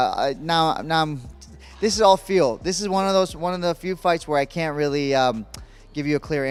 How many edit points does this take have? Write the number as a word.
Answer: zero